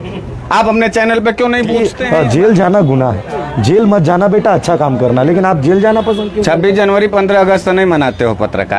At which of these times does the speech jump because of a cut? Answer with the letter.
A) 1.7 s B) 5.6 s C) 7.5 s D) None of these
A